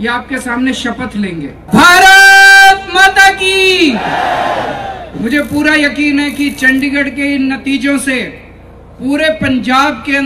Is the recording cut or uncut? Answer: cut